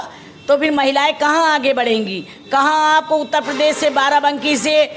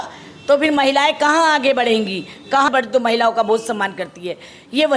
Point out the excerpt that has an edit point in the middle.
second; 1 cut; at 2.7 s

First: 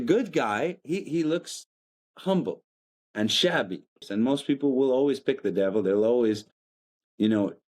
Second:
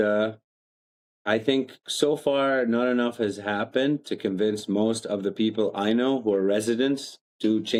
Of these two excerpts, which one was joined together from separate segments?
first; 1 cut; at 4.0 s

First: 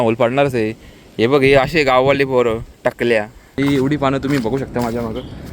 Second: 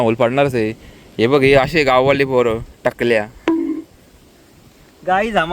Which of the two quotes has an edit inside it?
first; 1 cut; at 3.4 s

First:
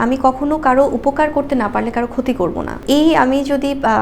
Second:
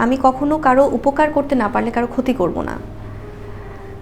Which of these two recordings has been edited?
first; 1 cut; at 2.8 s

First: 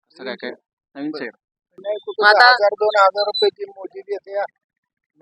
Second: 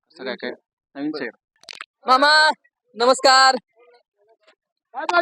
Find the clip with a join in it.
first; 1 cut; at 1.8 s

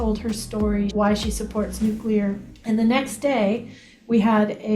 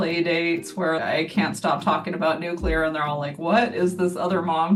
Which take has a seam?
first; 2 cuts; at 0.9 s, 2.5 s

